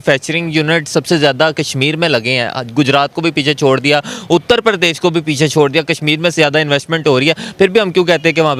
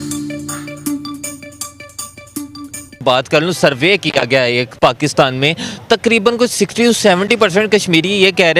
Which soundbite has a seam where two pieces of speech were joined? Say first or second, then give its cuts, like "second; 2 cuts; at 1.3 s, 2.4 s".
second; 1 cut; at 3.0 s